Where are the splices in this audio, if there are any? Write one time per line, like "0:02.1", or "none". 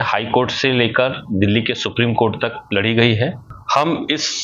0:03.5